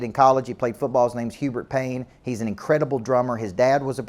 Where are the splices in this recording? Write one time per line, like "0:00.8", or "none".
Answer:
none